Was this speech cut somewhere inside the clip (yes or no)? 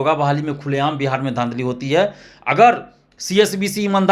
no